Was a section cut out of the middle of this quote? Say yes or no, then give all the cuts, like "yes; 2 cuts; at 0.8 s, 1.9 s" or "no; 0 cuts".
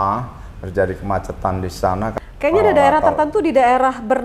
yes; 1 cut; at 2.1 s